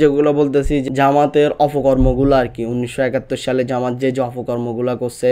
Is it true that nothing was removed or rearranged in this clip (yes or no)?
yes